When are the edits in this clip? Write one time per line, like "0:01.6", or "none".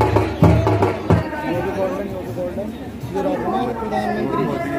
0:01.2